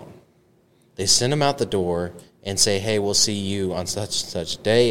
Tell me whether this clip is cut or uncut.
uncut